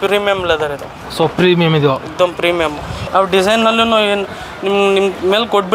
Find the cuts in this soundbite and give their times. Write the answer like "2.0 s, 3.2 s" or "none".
3.0 s